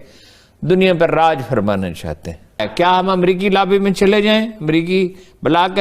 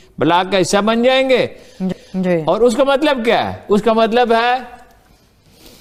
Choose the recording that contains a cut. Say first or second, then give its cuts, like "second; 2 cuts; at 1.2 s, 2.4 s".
first; 1 cut; at 2.6 s